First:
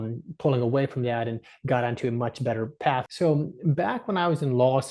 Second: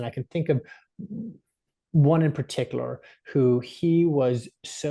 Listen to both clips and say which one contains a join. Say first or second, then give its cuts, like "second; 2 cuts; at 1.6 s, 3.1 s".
first; 1 cut; at 3.1 s